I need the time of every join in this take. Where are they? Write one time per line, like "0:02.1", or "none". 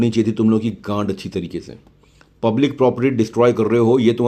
none